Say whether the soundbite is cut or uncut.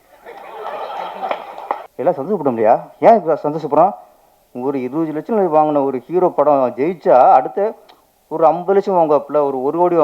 cut